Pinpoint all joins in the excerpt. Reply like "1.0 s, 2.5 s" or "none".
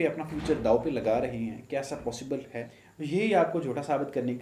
2.8 s